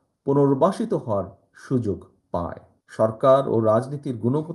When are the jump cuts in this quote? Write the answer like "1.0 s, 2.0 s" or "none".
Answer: 2.6 s